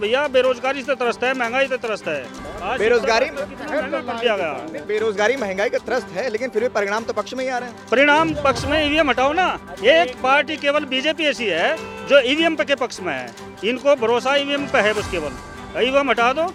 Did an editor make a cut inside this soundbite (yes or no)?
no